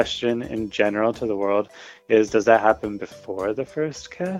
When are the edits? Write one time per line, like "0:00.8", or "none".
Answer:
none